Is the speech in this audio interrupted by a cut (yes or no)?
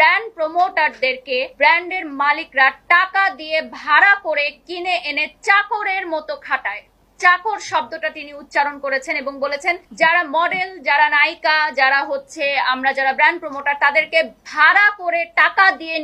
yes